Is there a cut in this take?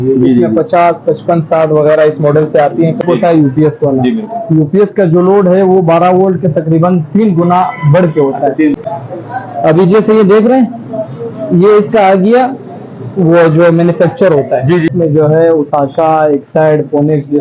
yes; 3 cuts; at 3.0 s, 8.8 s, 14.9 s

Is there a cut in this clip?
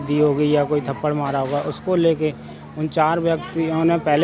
no; 0 cuts

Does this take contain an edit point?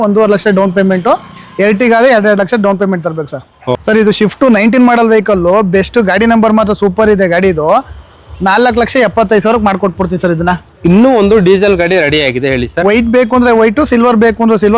yes; 1 cut; at 3.8 s

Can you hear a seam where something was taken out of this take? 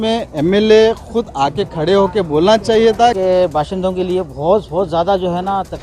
yes; 1 cut; at 3.2 s

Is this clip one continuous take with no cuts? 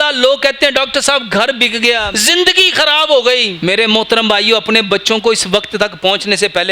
no; 2 cuts; at 2.1 s, 3.5 s

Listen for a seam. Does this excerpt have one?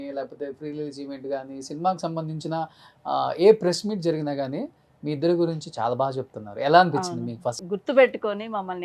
yes; 1 cut; at 7.6 s

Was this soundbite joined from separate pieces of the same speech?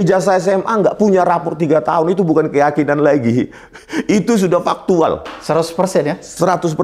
no; 0 cuts

